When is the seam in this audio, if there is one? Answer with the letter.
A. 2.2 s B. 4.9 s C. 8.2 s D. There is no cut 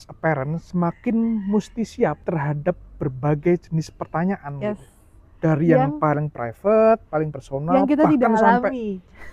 A